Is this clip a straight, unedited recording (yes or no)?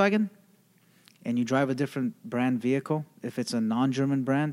yes